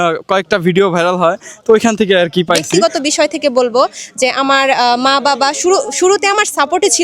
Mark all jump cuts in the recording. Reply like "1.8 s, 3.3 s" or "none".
2.8 s